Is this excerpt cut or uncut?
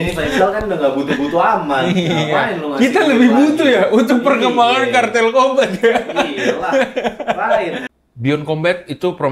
cut